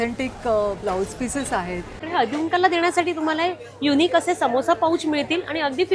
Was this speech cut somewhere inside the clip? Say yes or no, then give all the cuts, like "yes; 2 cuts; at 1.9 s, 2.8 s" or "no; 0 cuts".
yes; 1 cut; at 2.0 s